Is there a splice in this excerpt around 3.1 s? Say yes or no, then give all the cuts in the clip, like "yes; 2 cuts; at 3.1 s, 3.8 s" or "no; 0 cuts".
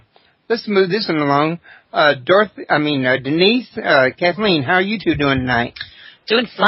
yes; 1 cut; at 3.1 s